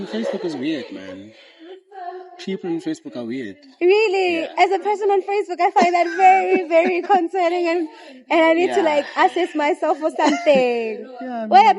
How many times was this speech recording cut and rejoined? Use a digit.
0